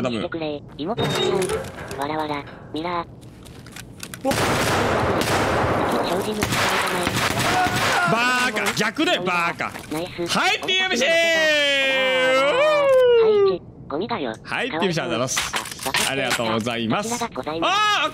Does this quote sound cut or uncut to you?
uncut